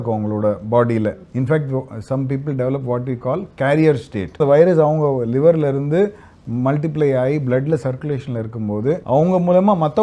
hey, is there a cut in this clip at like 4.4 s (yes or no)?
yes